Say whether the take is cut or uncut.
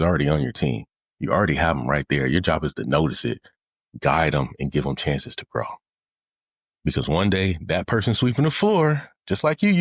uncut